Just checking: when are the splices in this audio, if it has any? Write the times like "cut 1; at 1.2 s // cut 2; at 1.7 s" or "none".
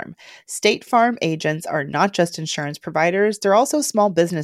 none